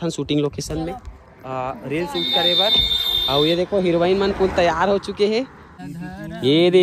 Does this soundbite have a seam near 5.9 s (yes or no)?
yes